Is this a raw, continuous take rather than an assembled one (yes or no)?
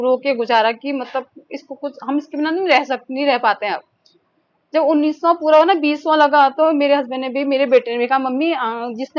yes